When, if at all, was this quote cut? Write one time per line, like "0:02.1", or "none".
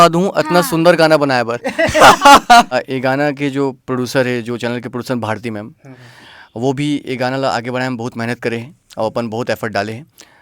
0:02.7